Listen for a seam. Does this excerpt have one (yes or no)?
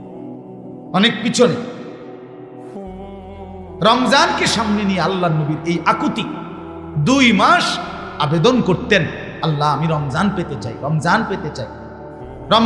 yes